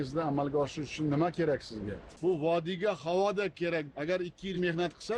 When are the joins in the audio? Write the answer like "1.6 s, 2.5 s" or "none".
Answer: 2.1 s

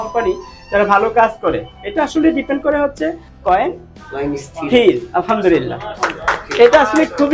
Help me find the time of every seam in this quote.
3.3 s

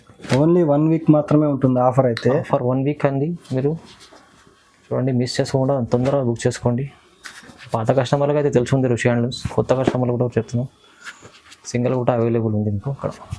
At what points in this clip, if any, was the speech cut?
none

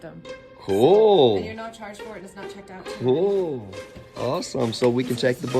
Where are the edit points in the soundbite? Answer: 4.1 s

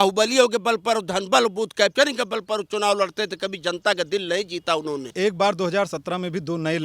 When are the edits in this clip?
5.1 s

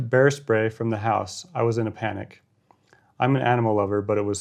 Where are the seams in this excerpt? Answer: none

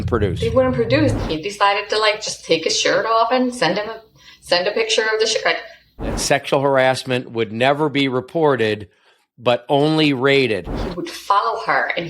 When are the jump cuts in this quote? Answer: 1.3 s, 6.2 s, 10.8 s

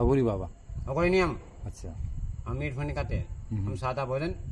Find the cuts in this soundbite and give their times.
none

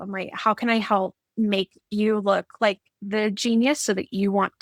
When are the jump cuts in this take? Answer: none

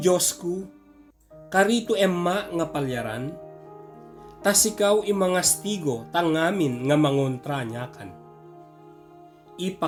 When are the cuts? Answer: none

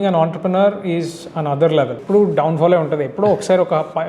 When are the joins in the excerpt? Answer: 2.0 s

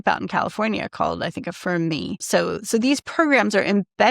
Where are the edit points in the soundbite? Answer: 2.2 s

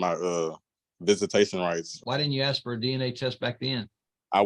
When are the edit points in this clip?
1.9 s

